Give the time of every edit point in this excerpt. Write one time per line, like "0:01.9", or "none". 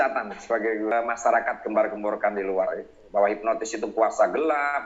0:00.9